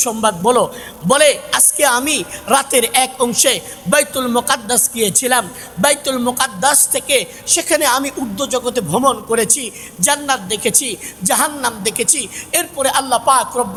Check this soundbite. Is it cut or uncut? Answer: uncut